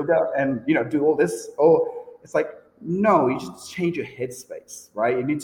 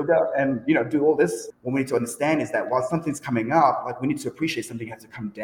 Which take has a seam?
second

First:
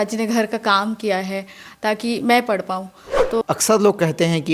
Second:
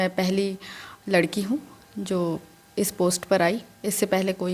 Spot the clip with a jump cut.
first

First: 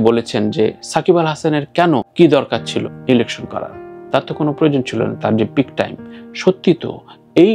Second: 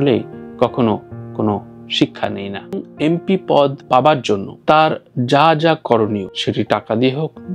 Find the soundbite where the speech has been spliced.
second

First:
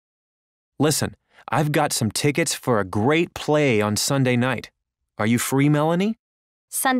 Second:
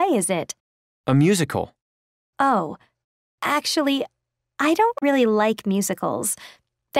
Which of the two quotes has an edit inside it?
first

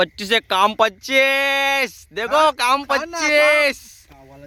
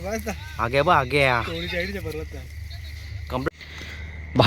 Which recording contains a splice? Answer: second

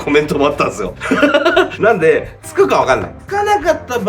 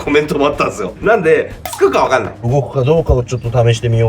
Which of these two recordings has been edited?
second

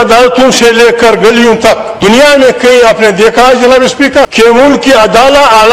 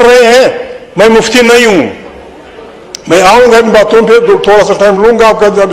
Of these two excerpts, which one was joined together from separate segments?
first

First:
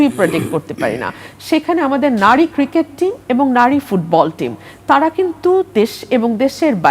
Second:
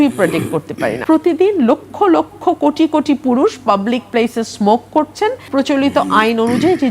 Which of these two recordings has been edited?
second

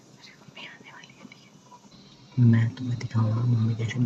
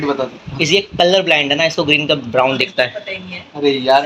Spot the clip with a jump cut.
first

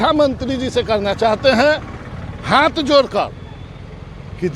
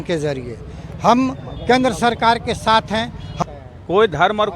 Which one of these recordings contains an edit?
second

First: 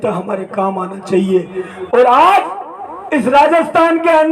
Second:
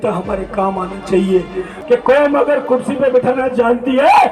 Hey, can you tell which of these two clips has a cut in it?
second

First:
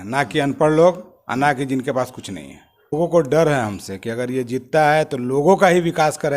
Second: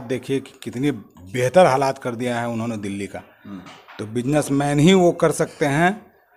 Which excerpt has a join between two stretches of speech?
first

